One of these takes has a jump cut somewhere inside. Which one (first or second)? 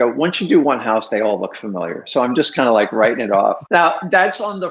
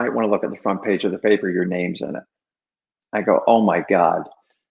first